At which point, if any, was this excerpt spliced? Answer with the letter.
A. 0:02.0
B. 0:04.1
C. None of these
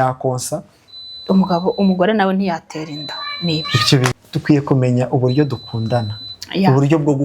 B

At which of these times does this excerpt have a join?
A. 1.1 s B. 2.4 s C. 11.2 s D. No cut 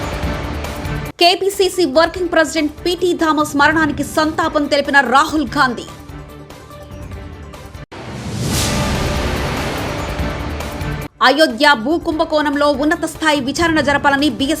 A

